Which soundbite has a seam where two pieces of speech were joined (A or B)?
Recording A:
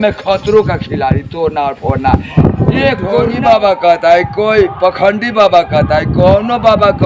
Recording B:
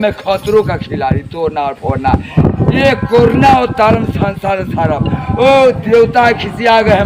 A